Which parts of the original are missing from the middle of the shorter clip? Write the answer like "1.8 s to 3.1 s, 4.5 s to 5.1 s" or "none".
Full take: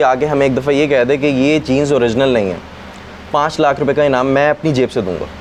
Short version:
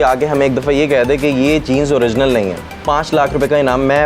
2.7 s to 3.1 s